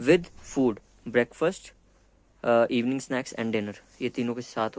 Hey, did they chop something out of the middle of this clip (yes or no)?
no